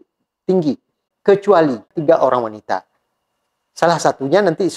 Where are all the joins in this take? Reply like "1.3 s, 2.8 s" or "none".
1.1 s, 1.9 s